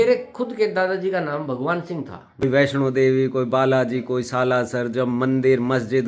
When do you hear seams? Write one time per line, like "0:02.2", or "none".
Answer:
0:02.4

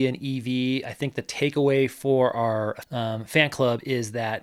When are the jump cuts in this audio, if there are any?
0:02.8

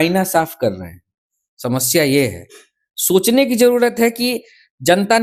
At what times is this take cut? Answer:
none

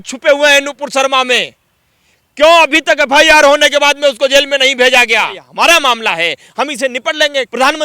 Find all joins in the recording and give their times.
0:05.4

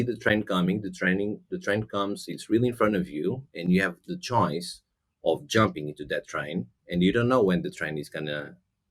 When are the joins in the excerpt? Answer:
none

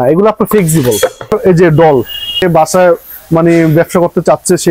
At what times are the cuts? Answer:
0:01.3
0:02.4

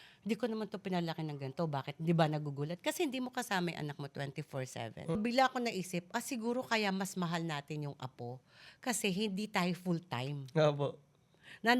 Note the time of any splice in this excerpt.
0:05.1

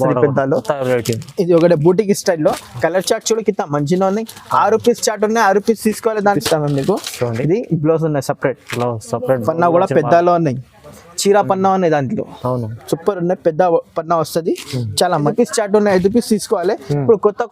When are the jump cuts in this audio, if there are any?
0:06.4
0:15.3

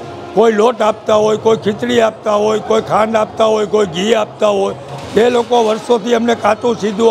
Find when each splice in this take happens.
none

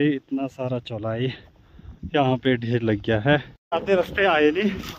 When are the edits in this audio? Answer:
0:03.6

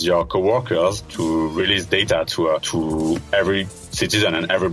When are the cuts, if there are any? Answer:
0:01.1
0:02.7
0:03.8

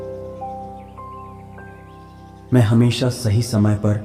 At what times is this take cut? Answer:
0:02.5

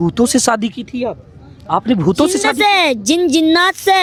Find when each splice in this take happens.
none

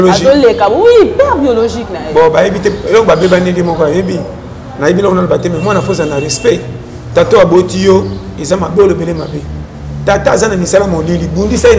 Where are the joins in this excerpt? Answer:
none

